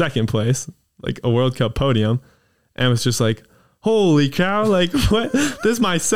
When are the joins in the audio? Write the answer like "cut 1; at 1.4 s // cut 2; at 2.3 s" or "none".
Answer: none